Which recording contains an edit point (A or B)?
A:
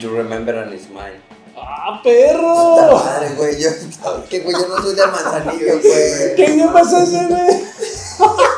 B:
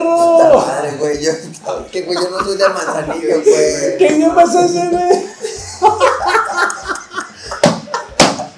A